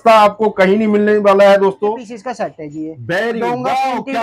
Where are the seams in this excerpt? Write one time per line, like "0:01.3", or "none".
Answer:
0:02.1

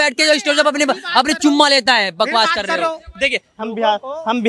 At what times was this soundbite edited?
none

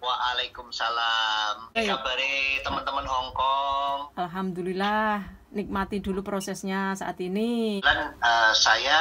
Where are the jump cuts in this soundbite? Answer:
0:01.8
0:07.8

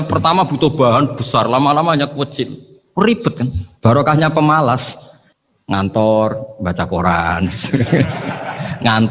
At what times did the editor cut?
none

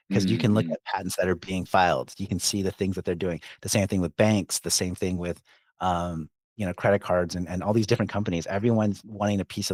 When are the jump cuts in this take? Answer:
none

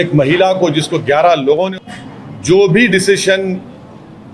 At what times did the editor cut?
0:01.7

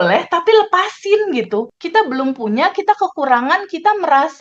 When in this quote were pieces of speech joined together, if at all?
0:01.8

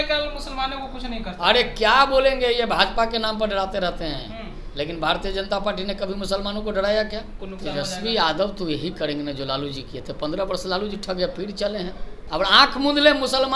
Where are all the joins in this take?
0:07.4
0:12.1

